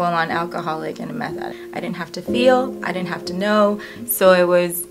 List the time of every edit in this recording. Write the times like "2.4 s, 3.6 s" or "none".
1.6 s, 3.9 s